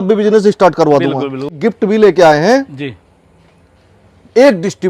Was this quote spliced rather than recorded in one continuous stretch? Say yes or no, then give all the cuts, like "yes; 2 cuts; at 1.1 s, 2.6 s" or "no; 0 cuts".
yes; 1 cut; at 1.6 s